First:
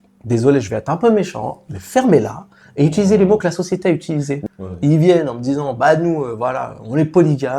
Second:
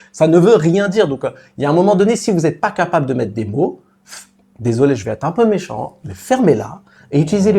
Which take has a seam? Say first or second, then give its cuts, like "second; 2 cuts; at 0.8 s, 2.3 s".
first; 1 cut; at 4.4 s